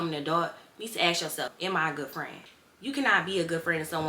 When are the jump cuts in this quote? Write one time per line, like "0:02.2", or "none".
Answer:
0:01.5

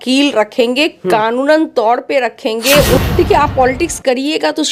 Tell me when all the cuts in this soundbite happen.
0:03.0

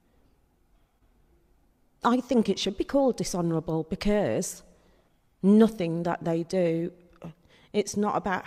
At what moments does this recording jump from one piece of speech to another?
none

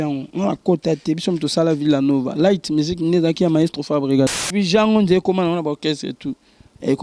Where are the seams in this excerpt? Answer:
0:04.4

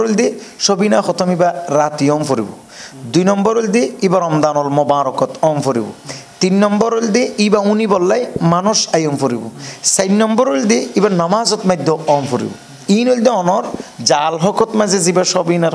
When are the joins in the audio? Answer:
none

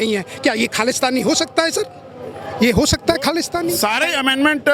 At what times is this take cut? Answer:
0:03.7

